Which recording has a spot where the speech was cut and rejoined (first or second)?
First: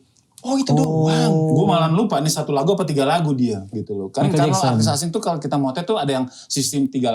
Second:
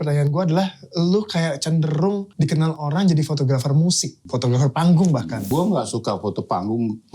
second